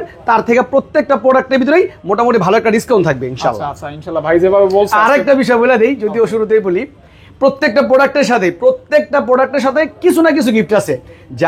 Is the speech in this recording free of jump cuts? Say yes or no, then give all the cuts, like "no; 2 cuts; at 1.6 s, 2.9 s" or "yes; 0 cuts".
yes; 0 cuts